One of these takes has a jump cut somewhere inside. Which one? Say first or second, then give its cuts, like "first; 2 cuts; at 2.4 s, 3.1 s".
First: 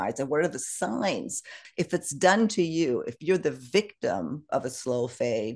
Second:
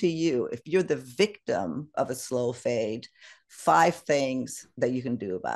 first; 1 cut; at 1.6 s